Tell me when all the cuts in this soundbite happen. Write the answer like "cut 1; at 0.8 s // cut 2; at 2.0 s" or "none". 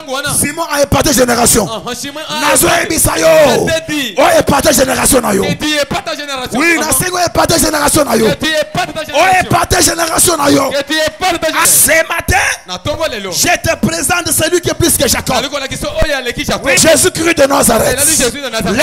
cut 1; at 11.7 s // cut 2; at 16.8 s